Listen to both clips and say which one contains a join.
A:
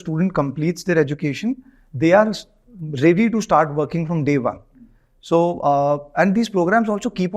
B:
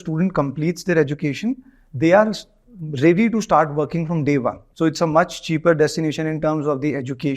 B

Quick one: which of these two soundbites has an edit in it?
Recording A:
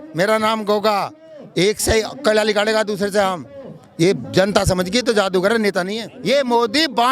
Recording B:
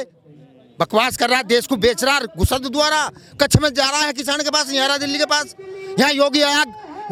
A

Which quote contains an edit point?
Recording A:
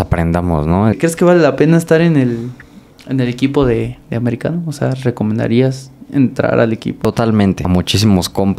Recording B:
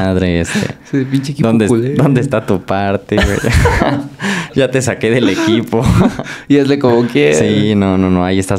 A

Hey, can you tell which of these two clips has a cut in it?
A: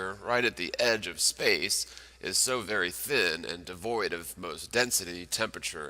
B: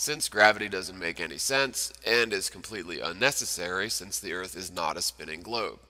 A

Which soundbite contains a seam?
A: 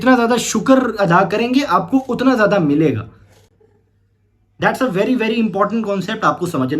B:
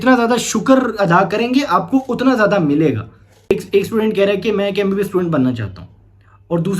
B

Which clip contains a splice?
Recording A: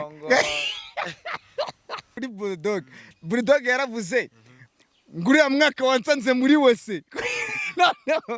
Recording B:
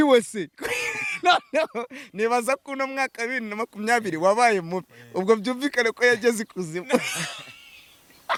A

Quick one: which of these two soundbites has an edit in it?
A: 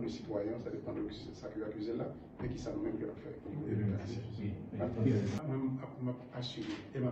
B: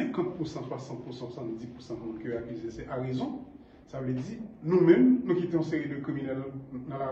A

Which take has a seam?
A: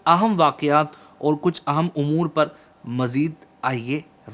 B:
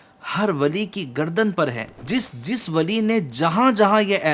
B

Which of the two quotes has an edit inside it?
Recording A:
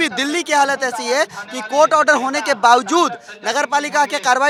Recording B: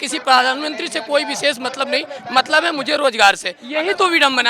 B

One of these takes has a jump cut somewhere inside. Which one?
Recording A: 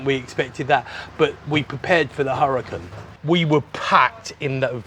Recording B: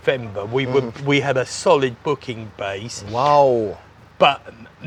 A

